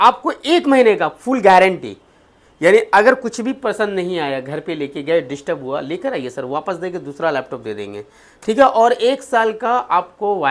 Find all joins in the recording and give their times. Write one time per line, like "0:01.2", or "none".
none